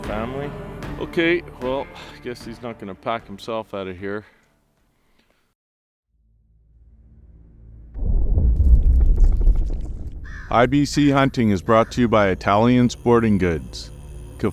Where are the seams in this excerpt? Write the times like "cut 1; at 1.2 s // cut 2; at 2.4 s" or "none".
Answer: cut 1; at 5.5 s